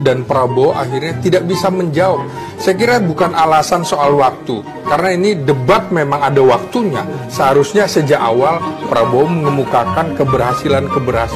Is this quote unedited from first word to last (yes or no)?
yes